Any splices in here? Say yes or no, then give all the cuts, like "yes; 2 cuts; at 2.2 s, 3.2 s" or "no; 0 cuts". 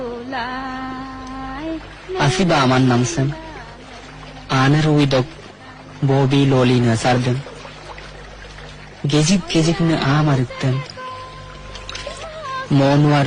no; 0 cuts